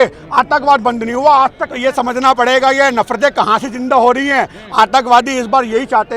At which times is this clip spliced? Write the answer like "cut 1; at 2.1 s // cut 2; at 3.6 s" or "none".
cut 1; at 1.7 s